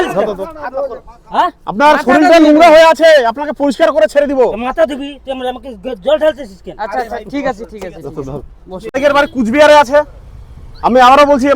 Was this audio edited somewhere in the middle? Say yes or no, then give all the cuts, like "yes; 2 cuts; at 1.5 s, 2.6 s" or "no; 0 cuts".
yes; 1 cut; at 8.9 s